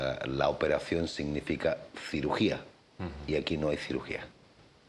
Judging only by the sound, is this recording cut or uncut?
cut